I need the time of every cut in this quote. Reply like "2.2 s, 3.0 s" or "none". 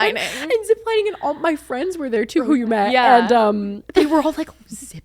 2.4 s, 3.8 s